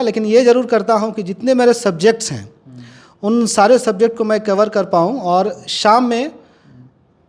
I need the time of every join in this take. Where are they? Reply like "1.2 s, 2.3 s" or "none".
none